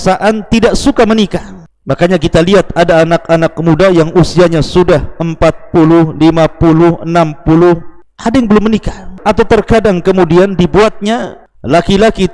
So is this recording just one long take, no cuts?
no; 1 cut; at 9.2 s

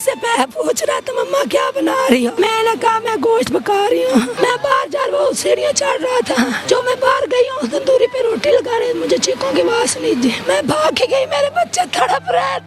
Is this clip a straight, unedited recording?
no; 4 cuts; at 2.3 s, 4.3 s, 6.6 s, 10.4 s

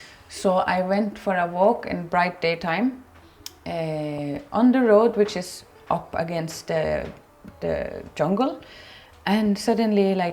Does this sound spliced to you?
no; 0 cuts

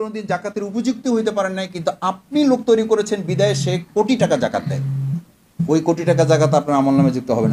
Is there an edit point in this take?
no; 0 cuts

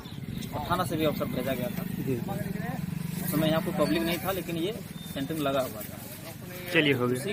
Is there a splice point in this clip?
no; 0 cuts

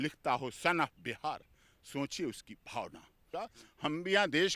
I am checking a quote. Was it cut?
yes; 1 cut; at 3.2 s

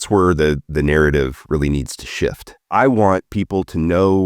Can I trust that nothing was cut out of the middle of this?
no; 1 cut; at 2.7 s

